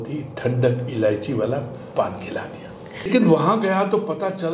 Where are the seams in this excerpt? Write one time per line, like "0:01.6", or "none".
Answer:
0:03.1

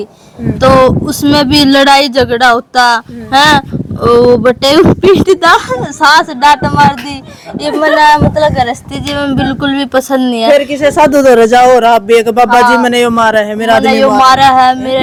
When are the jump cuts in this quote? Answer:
none

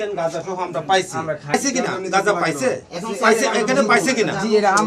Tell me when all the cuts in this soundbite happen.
0:01.5

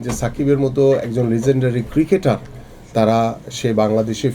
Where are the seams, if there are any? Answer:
none

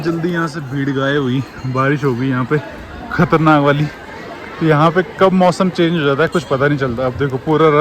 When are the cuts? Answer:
none

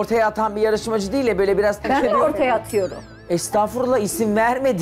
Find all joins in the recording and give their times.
0:01.8

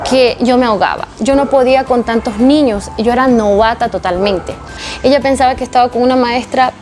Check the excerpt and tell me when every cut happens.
0:04.8

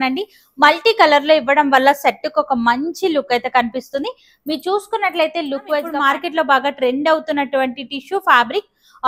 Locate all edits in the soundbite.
0:05.9

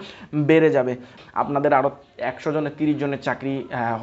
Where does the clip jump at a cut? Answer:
0:01.2

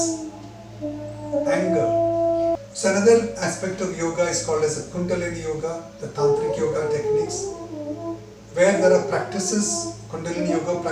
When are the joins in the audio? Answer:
0:02.6

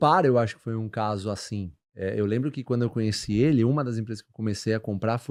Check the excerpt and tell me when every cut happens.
none

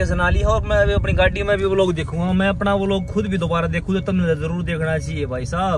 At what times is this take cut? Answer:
none

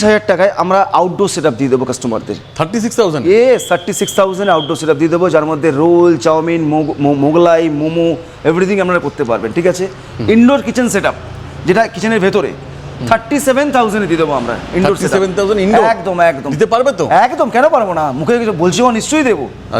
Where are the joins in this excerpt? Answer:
none

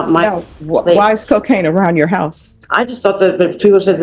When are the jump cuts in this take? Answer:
0:02.6

